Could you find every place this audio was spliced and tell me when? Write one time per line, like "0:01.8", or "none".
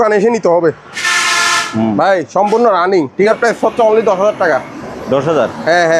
0:01.1
0:03.3